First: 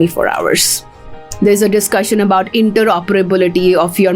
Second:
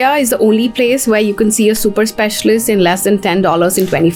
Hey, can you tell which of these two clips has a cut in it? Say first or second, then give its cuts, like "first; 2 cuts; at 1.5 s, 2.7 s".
first; 1 cut; at 1.2 s